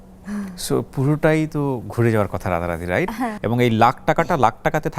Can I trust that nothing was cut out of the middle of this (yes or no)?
no